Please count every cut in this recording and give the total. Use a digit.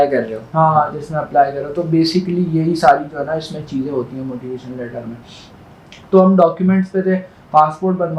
0